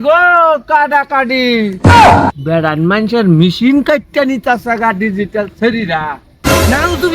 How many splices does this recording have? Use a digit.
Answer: 2